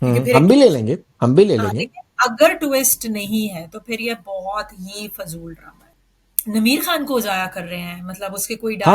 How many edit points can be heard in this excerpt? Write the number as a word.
one